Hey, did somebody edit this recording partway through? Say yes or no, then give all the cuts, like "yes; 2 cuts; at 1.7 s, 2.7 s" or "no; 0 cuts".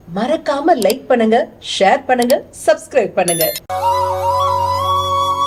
no; 0 cuts